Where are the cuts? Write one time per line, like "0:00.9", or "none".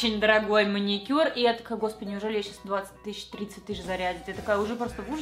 none

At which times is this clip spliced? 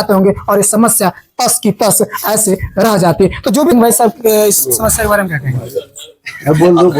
0:03.7

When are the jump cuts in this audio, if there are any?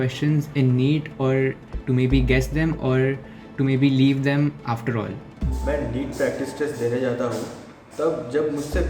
0:05.3

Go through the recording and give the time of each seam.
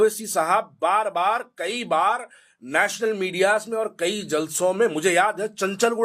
none

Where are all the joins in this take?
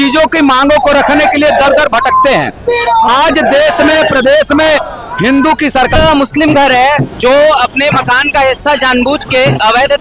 0:06.0

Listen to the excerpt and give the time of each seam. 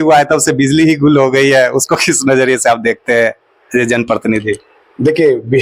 none

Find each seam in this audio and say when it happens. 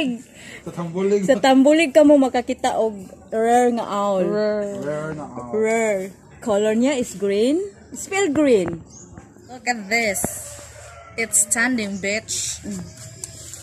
0:09.1

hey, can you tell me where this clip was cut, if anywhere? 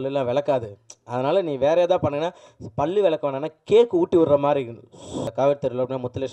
0:05.3

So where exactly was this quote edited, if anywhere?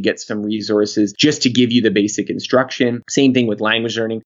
0:01.1
0:03.0

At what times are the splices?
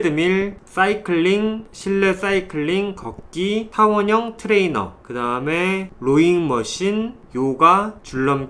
none

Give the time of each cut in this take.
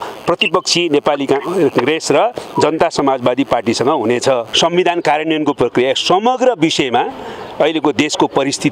0:04.5

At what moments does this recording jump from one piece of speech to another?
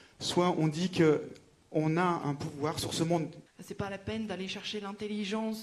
0:03.5

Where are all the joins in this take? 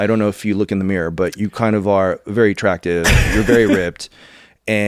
none

